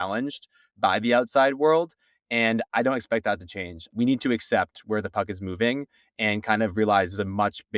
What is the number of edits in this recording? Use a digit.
1